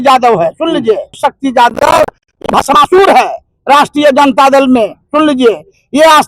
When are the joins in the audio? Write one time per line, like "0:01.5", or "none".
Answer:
0:01.2